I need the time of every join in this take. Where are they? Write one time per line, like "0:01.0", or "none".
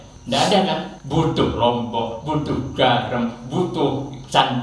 0:00.9